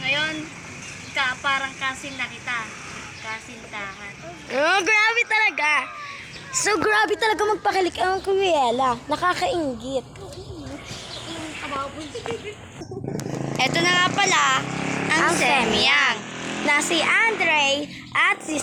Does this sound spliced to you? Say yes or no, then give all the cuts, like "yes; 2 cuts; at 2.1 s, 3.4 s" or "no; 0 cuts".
no; 0 cuts